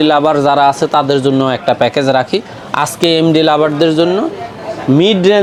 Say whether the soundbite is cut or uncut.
uncut